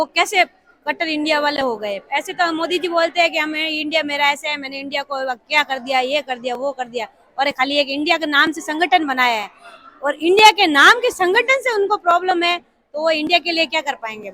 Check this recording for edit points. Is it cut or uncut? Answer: uncut